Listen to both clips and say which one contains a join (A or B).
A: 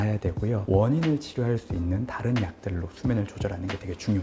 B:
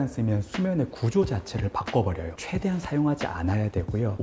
B